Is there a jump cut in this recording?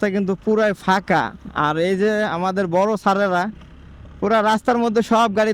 no; 0 cuts

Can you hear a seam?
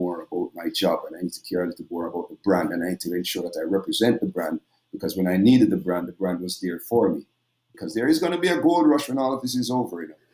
yes; 1 cut; at 7.7 s

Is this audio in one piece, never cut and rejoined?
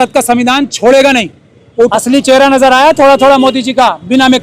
no; 1 cut; at 1.9 s

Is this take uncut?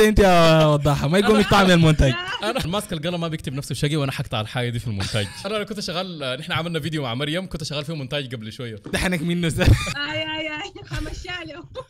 no; 4 cuts; at 2.7 s, 5.4 s, 8.9 s, 10.0 s

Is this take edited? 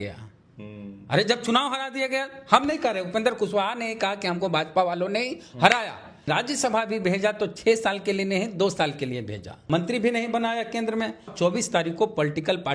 yes; 3 cuts; at 6.3 s, 9.6 s, 11.3 s

